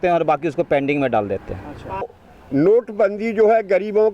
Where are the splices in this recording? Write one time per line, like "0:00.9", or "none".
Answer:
0:02.1

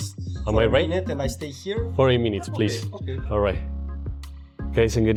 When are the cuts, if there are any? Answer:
none

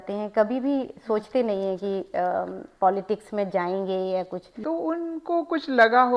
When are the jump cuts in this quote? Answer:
0:04.4

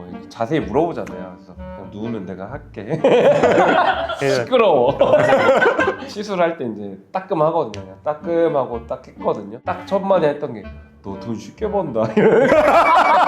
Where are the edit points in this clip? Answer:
0:06.0

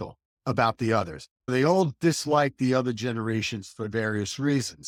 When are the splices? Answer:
none

